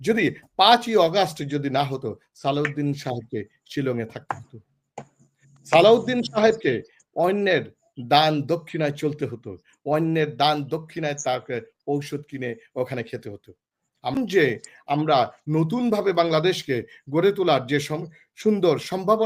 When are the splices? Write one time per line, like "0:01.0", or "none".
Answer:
0:14.1